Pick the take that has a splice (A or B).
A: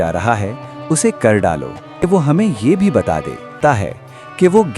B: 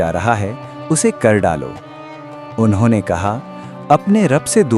A